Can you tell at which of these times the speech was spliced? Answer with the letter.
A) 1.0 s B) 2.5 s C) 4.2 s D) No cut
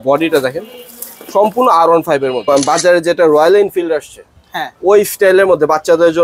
B